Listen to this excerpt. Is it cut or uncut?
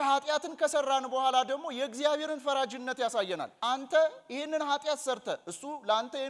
cut